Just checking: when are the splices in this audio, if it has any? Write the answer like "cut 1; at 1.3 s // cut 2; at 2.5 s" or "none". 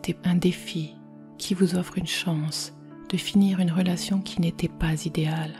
none